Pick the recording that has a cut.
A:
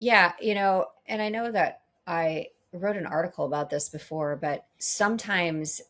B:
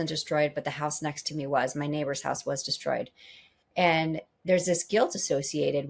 A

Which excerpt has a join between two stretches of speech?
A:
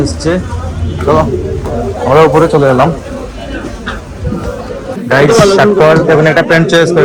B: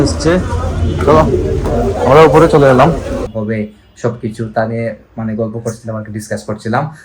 B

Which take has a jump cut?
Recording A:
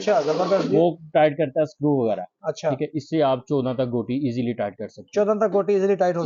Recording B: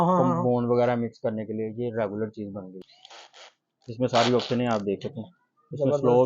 B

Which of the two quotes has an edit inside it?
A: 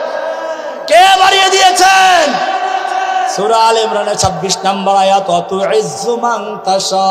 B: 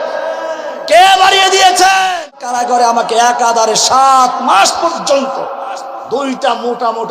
B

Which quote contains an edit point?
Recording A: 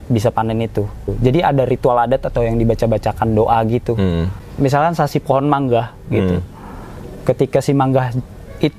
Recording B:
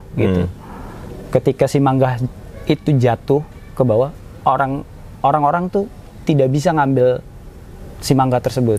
A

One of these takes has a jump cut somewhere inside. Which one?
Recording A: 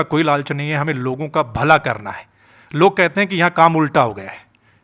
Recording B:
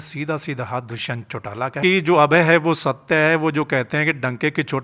B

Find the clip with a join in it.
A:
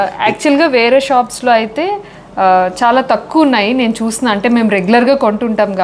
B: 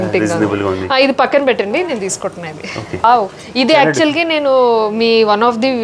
B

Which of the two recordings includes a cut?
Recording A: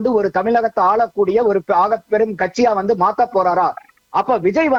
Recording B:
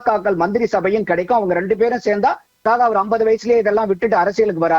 B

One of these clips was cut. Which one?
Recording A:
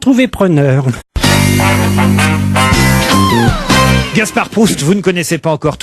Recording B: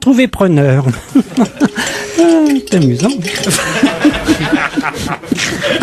B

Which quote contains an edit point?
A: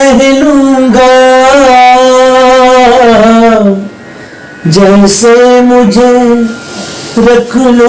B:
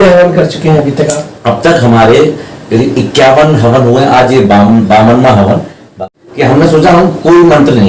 B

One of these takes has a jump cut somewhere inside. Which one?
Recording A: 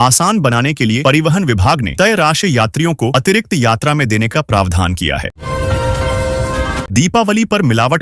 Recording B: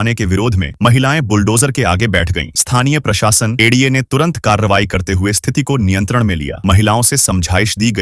A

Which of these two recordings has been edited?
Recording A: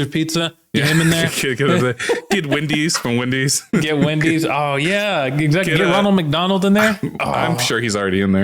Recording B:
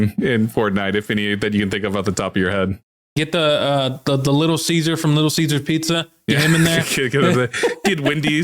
B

